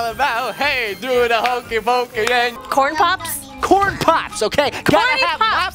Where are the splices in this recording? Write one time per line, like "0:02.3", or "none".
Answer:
0:02.6